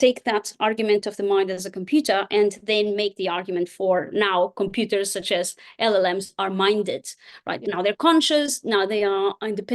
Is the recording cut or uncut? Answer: cut